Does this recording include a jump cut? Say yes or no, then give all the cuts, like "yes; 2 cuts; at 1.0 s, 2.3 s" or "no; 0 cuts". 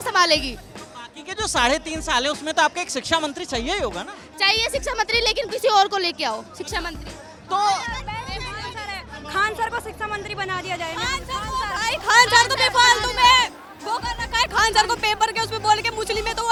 no; 0 cuts